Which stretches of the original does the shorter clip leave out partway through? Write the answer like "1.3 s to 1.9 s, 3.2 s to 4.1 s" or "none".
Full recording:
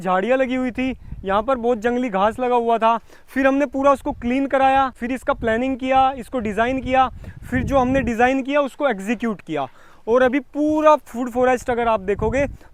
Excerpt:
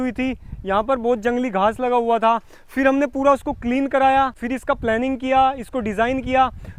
none